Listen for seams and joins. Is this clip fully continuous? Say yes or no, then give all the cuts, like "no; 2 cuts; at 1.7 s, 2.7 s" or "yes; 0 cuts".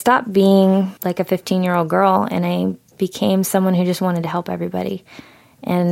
no; 1 cut; at 1.0 s